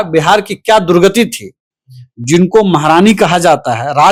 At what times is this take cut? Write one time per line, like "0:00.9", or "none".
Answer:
none